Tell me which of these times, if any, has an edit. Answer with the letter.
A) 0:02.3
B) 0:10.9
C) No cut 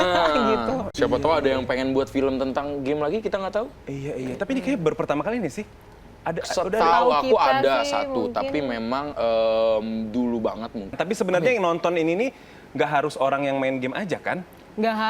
B